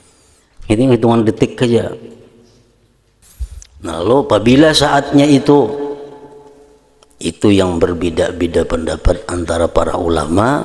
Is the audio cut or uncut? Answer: cut